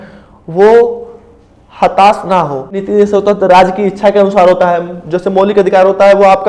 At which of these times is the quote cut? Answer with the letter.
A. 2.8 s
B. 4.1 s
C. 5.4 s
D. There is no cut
A